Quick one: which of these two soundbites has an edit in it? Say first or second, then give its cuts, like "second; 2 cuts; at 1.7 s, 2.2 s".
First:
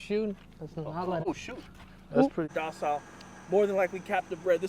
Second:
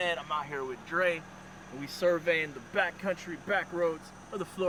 first; 2 cuts; at 1.3 s, 2.5 s